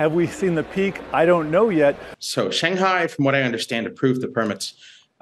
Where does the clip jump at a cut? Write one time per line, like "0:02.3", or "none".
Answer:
0:02.1